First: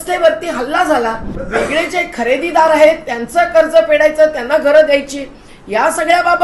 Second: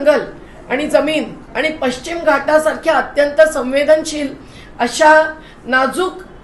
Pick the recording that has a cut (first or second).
first